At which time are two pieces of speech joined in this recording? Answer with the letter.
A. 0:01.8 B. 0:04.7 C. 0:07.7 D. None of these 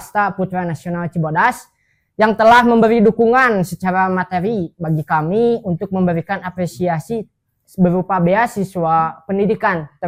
D